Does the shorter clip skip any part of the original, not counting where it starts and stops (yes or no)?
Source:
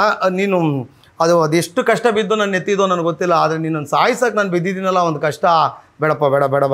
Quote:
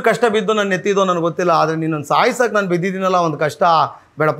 no